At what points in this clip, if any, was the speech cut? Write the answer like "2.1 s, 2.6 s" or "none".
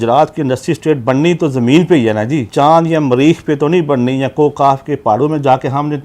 2.5 s